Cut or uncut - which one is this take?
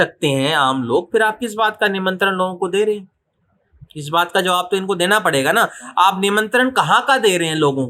uncut